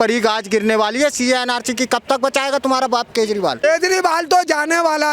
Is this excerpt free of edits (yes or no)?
no